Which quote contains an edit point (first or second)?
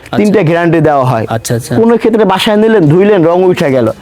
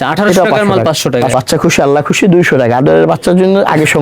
second